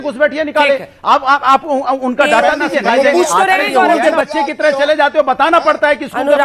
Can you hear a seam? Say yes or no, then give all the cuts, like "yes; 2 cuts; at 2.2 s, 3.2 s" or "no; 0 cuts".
yes; 1 cut; at 4.0 s